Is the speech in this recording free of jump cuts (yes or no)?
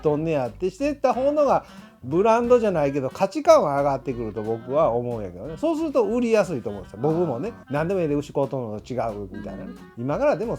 no